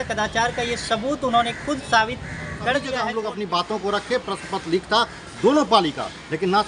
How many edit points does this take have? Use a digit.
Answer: 1